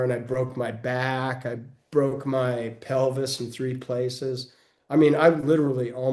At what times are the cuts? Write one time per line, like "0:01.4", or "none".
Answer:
none